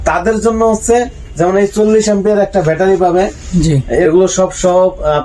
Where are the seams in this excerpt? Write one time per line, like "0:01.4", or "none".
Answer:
0:04.0